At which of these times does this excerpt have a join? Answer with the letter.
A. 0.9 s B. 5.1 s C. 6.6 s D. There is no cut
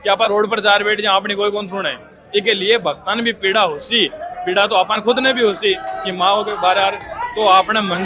D